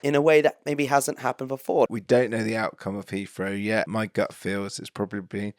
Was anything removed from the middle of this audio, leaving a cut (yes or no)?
yes